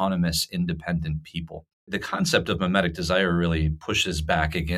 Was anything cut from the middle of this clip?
yes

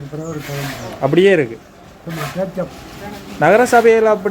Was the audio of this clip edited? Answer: no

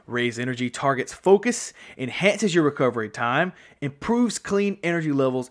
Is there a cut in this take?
no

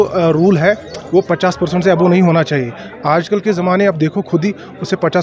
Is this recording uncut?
yes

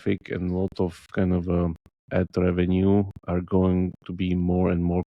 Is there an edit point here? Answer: no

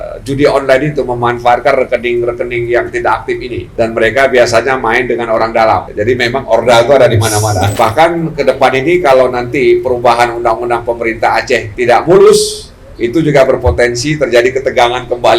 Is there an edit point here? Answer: yes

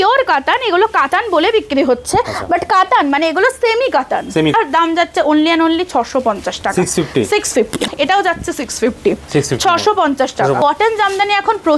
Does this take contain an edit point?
yes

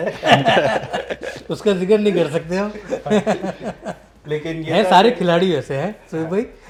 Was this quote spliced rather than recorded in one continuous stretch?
no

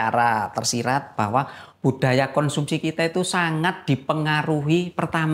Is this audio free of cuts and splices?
yes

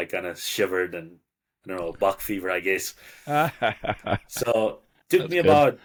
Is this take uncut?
yes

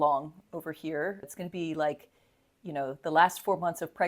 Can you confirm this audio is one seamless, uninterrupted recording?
no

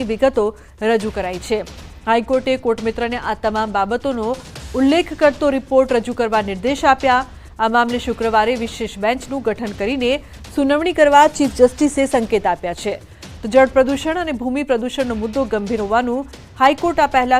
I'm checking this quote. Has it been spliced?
yes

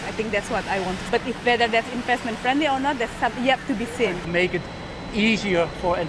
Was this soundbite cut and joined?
yes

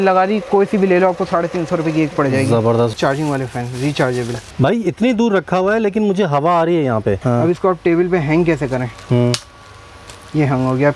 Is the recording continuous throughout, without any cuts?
no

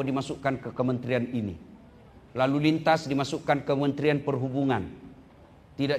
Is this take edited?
no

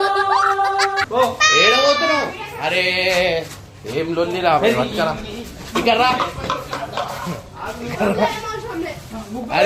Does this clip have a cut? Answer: no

